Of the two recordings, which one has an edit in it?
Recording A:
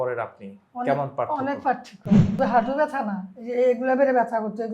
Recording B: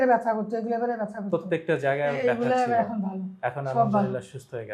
A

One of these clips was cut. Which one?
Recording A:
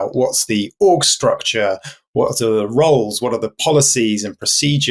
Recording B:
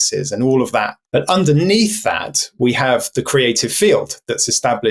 B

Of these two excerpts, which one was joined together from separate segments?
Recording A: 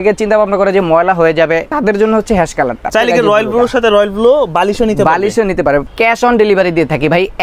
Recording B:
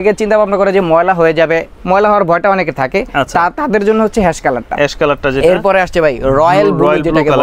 A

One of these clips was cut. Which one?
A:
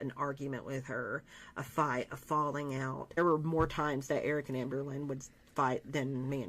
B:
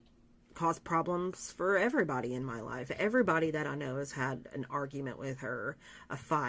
A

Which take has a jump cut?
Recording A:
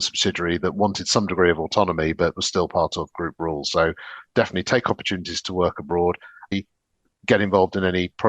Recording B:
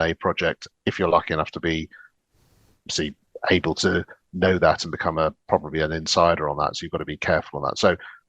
A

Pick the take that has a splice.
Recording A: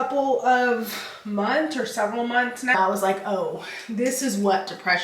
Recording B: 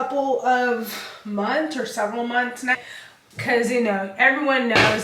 A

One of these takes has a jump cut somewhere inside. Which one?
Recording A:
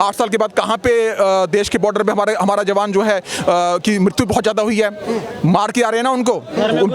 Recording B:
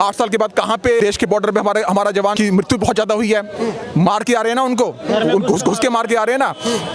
B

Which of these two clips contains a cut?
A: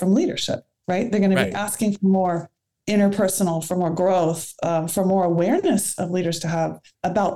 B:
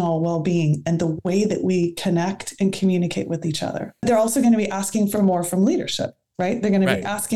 B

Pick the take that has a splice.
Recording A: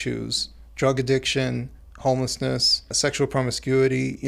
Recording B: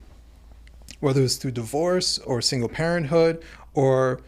A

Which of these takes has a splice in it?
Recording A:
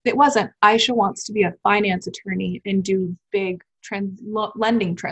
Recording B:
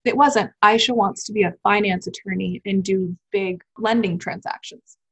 B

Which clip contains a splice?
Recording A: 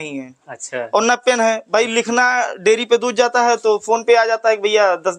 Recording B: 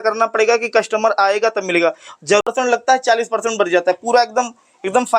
B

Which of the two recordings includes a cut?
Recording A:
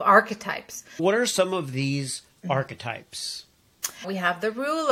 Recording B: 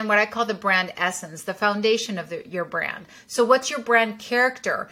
A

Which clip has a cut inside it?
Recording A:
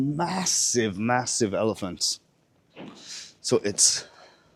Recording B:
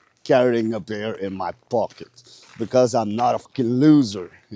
B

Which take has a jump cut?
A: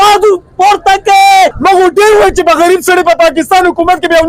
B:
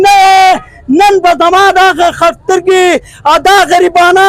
A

